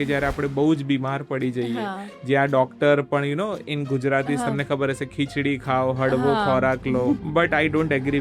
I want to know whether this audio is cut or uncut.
cut